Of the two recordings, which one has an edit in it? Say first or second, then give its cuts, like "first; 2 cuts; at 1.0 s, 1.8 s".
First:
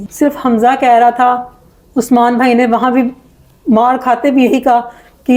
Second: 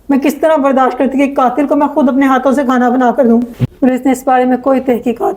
second; 1 cut; at 3.5 s